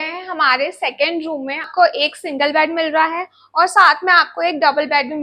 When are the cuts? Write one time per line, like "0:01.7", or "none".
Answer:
0:01.7

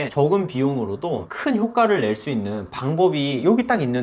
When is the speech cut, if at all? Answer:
none

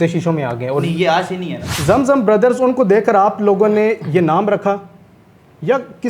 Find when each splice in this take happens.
0:01.7

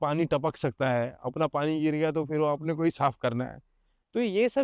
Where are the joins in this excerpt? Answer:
none

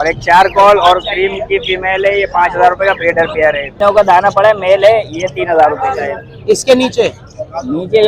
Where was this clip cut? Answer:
0:03.7

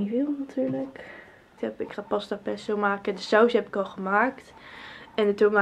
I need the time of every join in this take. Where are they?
0:01.6

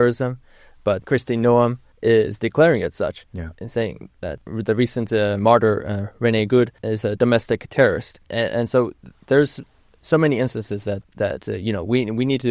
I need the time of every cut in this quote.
0:01.0
0:01.9
0:04.4
0:06.9
0:08.2
0:11.0

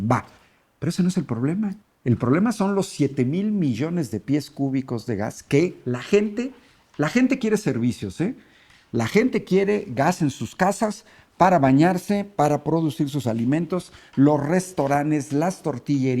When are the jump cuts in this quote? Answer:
0:01.9

